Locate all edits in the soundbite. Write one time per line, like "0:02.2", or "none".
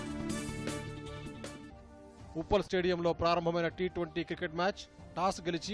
none